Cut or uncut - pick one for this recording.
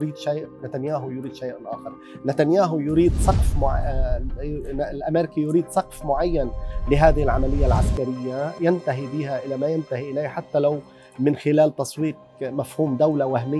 uncut